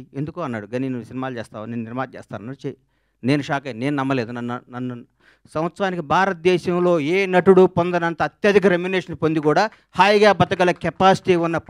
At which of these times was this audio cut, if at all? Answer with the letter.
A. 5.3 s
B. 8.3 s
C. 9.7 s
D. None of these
A